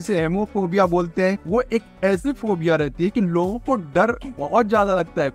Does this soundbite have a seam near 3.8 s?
no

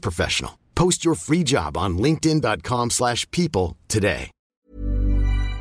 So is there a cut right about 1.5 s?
no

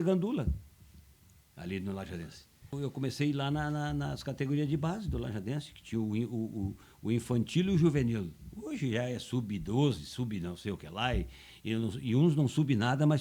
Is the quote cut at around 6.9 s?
no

